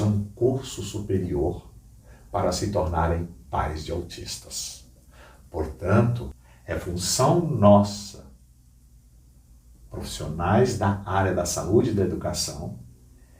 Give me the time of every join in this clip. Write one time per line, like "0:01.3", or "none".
0:06.3